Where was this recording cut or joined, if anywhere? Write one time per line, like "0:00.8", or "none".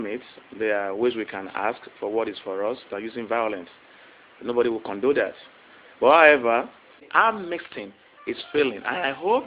0:07.1